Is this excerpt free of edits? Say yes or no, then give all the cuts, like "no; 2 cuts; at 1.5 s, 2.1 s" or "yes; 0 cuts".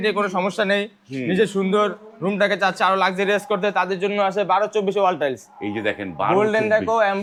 yes; 0 cuts